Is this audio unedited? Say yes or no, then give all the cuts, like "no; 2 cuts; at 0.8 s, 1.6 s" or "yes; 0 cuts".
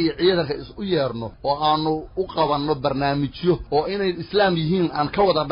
no; 2 cuts; at 1.3 s, 3.6 s